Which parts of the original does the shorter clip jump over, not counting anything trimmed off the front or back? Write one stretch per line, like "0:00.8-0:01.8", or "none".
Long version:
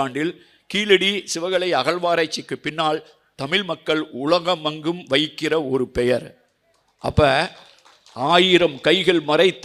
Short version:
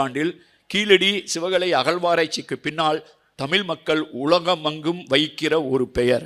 none

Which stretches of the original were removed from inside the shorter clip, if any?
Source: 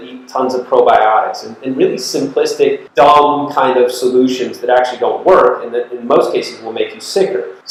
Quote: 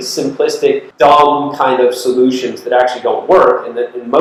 none

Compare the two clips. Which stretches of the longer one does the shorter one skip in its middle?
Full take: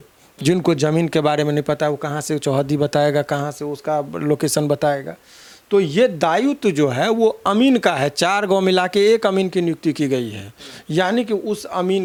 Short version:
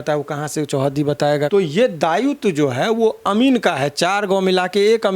0:03.2-0:05.7

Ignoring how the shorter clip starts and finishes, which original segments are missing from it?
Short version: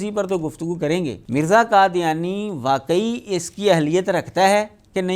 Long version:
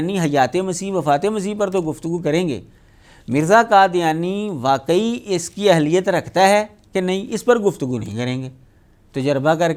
0:02.6-0:03.2

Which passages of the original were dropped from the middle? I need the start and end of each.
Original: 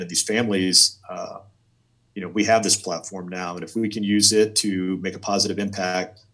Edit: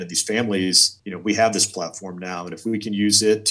0:00.9-0:02.0

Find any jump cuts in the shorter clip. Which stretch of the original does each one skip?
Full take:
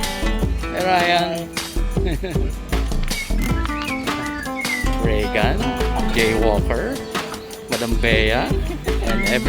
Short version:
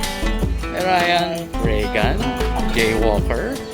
0:01.5-0:04.9

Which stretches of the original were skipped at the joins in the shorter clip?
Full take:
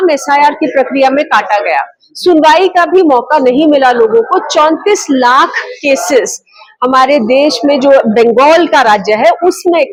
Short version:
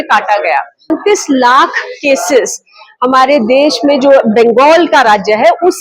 0:02.2-0:04.7

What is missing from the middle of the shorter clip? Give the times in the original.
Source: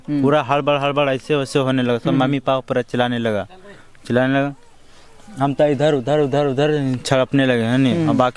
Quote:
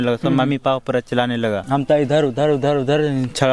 0:03.4-0:05.3

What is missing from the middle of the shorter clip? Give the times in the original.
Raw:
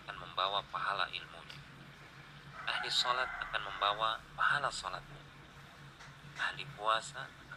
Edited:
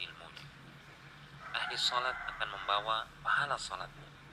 none

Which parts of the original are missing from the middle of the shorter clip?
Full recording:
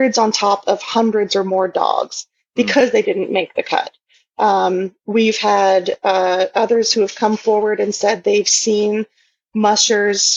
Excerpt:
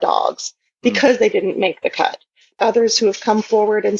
0:04.3-0:06.5

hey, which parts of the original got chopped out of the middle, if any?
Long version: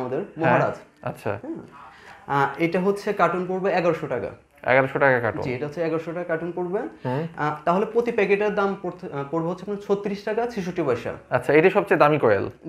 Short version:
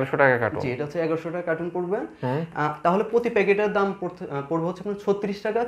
none

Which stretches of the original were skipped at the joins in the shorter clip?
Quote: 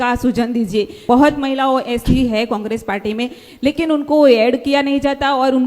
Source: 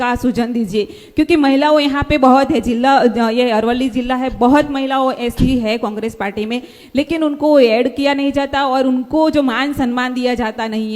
0:01.0-0:04.3

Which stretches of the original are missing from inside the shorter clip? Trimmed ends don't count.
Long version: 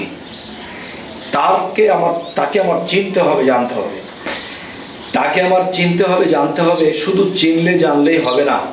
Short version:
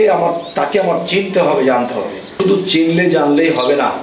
0:04.1-0:07.0

